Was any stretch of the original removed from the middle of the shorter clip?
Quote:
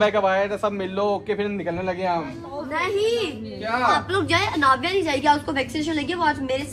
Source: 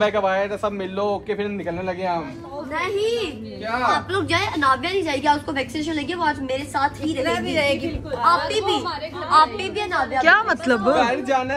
no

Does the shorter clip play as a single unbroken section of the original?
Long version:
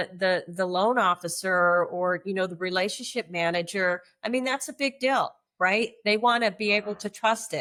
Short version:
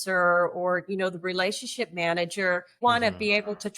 no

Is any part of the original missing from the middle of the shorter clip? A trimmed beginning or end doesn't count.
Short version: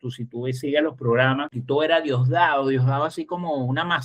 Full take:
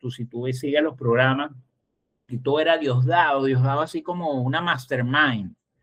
yes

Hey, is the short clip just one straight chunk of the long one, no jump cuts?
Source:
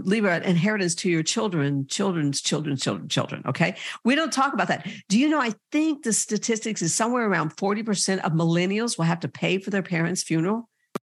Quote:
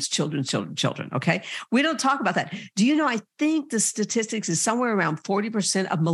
yes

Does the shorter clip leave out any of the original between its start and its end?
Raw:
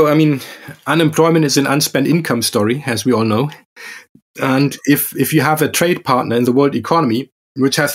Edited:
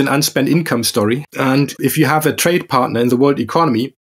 yes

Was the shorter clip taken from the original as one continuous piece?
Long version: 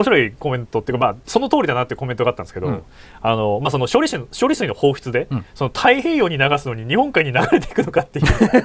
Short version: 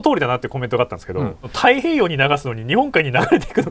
no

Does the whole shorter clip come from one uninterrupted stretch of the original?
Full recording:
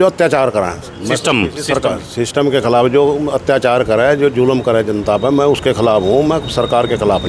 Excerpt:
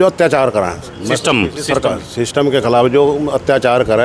yes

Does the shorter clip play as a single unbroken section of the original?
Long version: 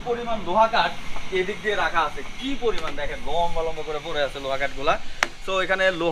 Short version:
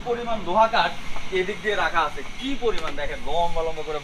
yes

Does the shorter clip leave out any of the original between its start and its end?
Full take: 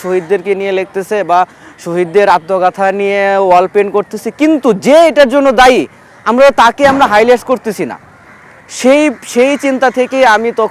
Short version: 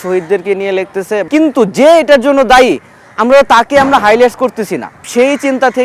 yes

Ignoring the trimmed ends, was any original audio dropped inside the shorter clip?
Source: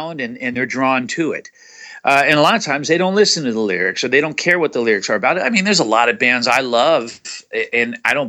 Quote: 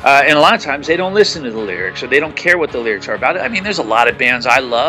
no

